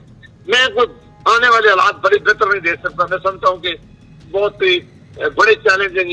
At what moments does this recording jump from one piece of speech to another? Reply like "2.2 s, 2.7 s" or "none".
none